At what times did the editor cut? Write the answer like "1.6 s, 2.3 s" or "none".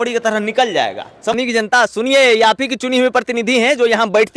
1.3 s